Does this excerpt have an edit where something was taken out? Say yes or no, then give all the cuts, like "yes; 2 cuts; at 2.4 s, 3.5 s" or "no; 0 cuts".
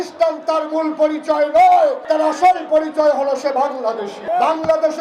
yes; 2 cuts; at 2.0 s, 4.1 s